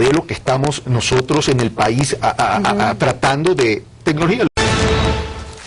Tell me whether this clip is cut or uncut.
uncut